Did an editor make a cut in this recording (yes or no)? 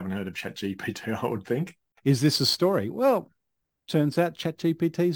yes